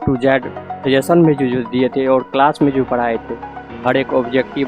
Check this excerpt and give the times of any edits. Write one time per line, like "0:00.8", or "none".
none